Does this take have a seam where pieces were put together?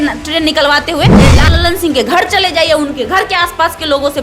yes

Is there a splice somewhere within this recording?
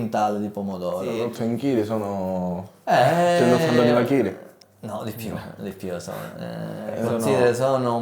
yes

